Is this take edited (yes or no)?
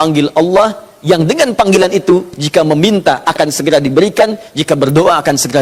no